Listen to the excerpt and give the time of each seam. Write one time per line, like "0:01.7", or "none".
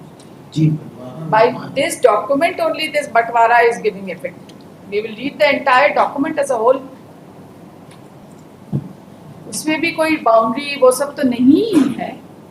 0:08.2